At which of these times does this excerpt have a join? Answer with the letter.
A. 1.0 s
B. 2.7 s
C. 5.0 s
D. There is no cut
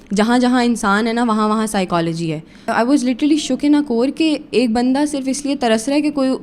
B